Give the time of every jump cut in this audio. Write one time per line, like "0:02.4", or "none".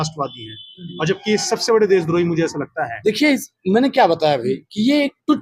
0:02.9